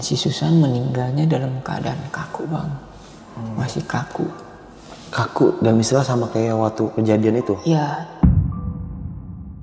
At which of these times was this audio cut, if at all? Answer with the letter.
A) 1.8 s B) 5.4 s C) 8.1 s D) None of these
C